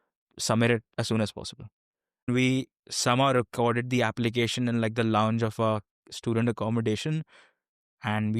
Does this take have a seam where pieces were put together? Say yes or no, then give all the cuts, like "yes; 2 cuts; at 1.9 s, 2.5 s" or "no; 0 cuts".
yes; 1 cut; at 2.3 s